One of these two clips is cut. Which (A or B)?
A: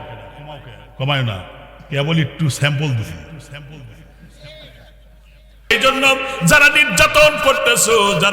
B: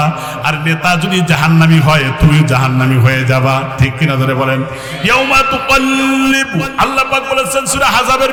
A